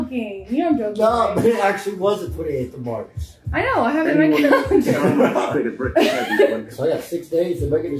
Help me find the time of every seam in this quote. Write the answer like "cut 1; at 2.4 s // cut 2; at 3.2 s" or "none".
cut 1; at 6.7 s